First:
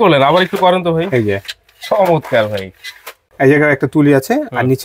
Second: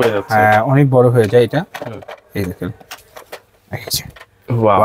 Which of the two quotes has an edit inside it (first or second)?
first